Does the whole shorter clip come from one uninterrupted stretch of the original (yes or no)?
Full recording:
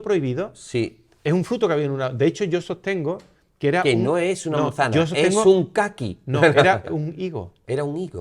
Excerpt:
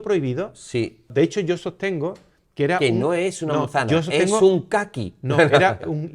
no